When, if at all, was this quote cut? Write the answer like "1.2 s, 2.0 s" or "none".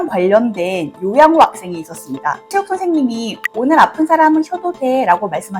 2.5 s, 3.4 s

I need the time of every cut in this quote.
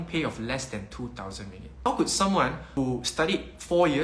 1.9 s, 2.8 s

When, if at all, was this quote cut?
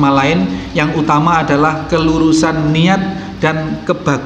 none

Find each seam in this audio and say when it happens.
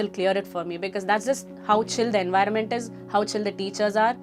none

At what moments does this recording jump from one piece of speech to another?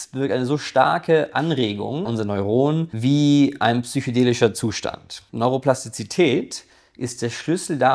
2.0 s, 2.9 s, 5.2 s

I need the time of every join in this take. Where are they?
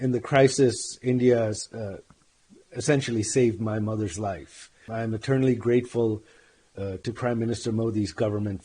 4.8 s

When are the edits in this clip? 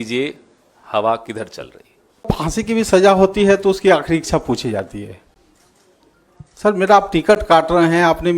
2.3 s

